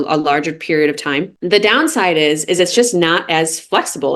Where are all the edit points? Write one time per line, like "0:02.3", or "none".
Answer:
none